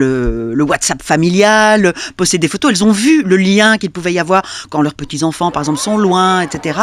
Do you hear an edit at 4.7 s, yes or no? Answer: no